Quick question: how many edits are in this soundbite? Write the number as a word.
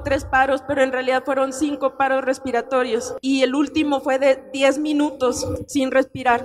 two